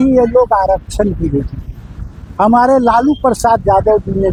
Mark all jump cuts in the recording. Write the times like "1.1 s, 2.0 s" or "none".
none